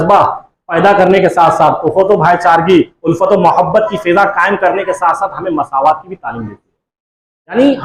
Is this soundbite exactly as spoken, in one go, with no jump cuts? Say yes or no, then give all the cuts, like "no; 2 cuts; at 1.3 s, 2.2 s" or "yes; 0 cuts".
yes; 0 cuts